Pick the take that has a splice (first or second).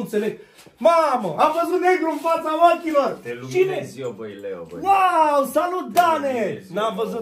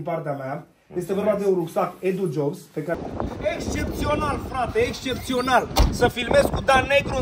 second